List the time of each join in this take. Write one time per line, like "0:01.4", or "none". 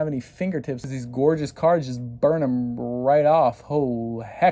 0:00.9